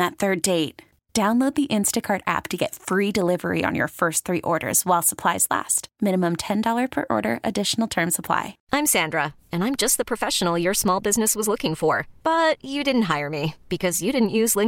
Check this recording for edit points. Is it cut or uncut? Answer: cut